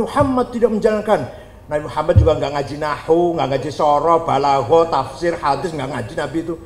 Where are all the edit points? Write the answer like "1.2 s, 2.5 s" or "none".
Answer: none